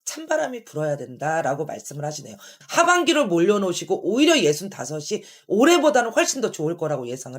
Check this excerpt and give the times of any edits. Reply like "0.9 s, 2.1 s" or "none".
2.6 s